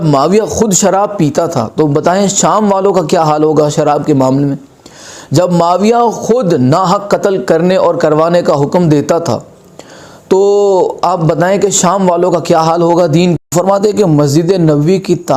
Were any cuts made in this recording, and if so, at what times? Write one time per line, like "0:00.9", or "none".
0:13.4

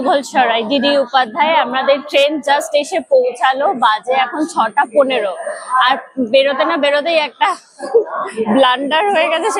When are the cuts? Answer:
none

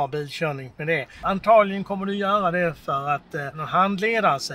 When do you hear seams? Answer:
0:01.2
0:03.6

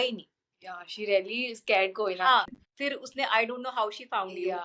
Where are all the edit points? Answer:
0:02.5

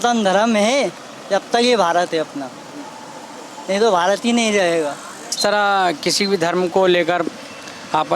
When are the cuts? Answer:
0:05.3

